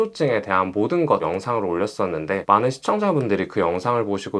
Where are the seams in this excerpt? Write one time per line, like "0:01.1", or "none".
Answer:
0:01.2